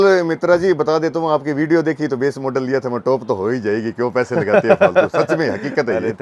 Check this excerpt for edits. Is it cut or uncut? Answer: uncut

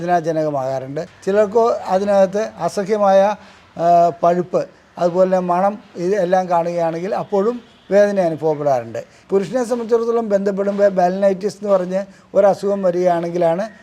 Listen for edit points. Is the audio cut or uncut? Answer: cut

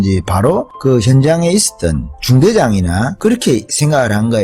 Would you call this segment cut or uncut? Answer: cut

